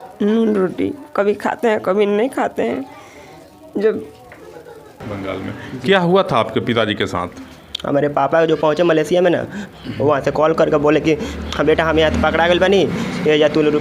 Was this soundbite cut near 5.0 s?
yes; 1 cut; at 5.0 s

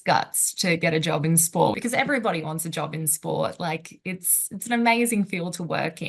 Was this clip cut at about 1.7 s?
yes; 1 cut; at 1.7 s

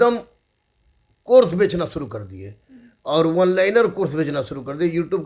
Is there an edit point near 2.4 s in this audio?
no; 0 cuts

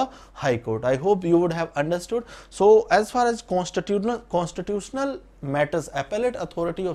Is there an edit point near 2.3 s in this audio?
no; 0 cuts

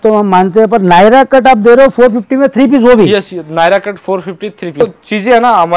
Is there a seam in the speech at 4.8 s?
yes; 1 cut; at 4.8 s

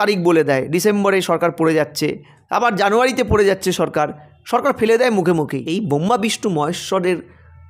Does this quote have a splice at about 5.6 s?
yes; 1 cut; at 5.6 s

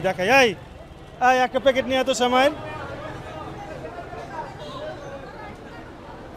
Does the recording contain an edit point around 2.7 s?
no; 0 cuts

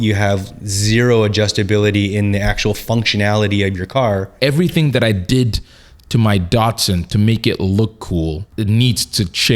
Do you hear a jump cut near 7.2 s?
no; 2 cuts; at 4.3 s, 8.4 s

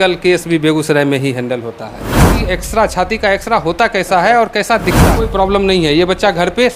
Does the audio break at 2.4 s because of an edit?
yes; 2 cuts; at 2.4 s, 5.1 s

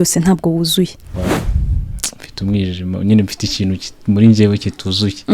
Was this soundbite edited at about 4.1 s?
no; 1 cut; at 1.1 s

